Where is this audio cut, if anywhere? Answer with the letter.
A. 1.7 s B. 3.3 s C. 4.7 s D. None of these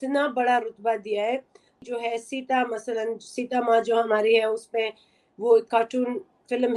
A